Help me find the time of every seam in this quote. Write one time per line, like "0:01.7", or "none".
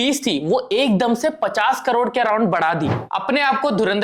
0:03.0